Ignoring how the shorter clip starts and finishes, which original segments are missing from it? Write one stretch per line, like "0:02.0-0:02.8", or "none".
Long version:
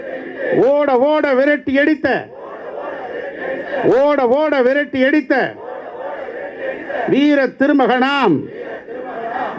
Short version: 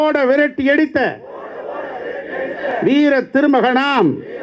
0:03.8-0:07.0